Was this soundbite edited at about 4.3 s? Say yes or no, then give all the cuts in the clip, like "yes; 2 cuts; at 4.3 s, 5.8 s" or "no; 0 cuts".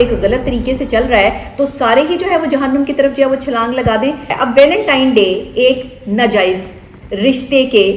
yes; 1 cut; at 4.3 s